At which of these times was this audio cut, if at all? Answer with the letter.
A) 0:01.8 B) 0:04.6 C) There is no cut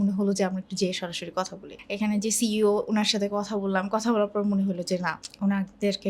A